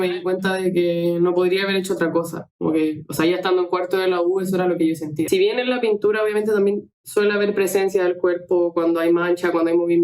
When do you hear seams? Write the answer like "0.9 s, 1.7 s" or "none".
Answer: 5.3 s